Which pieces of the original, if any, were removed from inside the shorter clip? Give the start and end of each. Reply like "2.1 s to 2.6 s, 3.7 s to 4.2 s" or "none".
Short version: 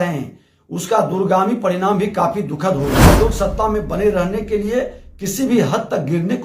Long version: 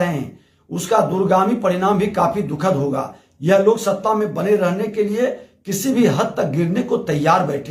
3.2 s to 3.6 s